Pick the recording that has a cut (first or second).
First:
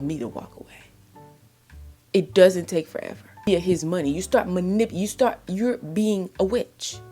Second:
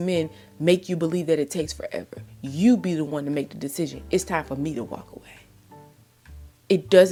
first